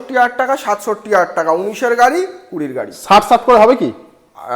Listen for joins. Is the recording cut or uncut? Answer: uncut